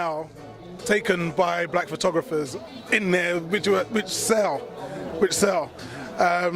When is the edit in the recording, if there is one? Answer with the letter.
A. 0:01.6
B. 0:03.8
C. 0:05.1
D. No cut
A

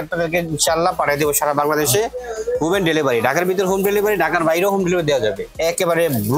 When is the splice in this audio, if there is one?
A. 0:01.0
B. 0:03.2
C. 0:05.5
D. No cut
C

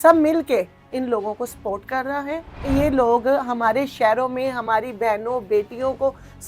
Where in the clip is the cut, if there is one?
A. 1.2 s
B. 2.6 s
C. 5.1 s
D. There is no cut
B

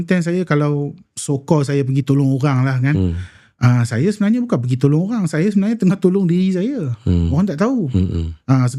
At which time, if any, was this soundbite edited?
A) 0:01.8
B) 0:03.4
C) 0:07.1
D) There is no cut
D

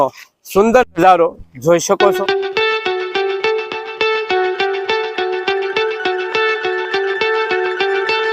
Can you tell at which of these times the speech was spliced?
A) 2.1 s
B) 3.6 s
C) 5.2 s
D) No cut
A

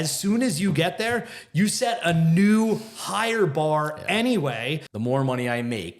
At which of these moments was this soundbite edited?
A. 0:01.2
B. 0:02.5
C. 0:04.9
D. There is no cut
C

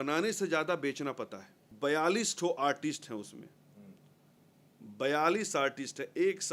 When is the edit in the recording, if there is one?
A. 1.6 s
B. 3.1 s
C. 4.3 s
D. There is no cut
A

